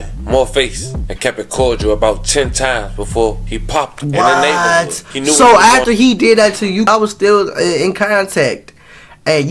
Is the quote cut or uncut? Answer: cut